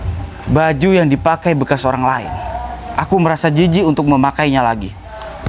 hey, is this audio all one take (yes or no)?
yes